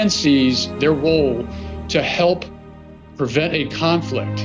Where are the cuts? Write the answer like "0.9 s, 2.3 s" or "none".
3.0 s